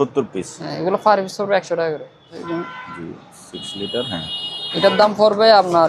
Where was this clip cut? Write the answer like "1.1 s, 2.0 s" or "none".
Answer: 2.4 s